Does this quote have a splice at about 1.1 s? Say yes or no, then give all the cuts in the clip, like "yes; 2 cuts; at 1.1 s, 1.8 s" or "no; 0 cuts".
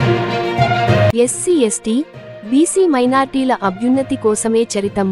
yes; 1 cut; at 1.1 s